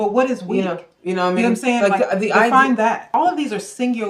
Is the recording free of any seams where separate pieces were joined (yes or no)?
no